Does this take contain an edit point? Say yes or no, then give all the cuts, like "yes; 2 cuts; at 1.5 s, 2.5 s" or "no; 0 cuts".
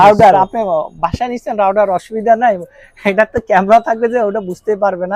no; 0 cuts